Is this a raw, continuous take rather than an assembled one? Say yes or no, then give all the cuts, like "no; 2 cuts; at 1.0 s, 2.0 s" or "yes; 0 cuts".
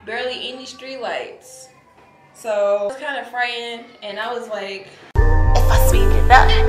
no; 2 cuts; at 2.9 s, 4.9 s